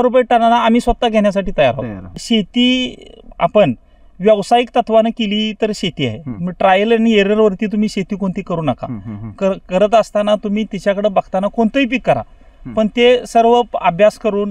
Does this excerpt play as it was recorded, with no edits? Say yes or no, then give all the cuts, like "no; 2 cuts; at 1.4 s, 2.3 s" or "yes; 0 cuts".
no; 1 cut; at 2.2 s